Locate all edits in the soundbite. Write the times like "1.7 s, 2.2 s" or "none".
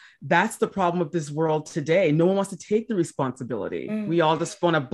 none